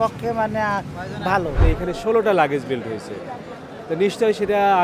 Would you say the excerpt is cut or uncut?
cut